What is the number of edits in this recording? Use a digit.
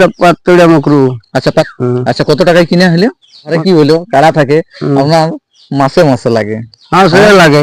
2